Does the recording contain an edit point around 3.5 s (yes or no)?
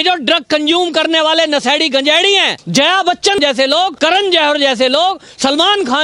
yes